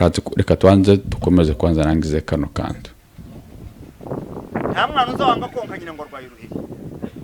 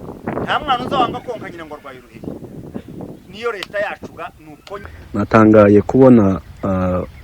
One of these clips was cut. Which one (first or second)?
second